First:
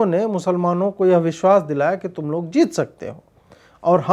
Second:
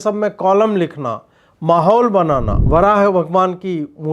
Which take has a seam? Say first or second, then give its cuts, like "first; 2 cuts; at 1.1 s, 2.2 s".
second; 1 cut; at 2.6 s